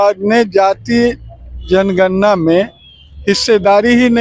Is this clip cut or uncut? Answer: uncut